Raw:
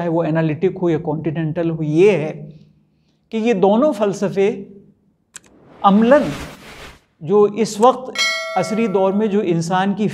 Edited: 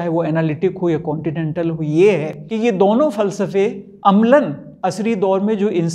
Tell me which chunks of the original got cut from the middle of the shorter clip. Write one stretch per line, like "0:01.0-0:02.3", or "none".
0:02.4-0:03.2
0:04.7-0:05.6
0:06.4-0:08.4